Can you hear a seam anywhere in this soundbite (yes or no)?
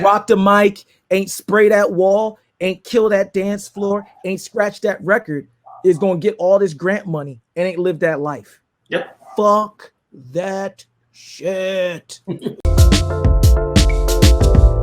yes